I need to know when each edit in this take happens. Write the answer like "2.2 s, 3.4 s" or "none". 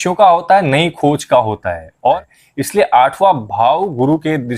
2.4 s